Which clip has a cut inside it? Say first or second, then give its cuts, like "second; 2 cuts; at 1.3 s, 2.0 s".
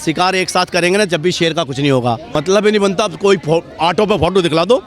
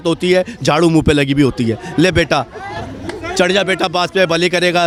first; 1 cut; at 2.4 s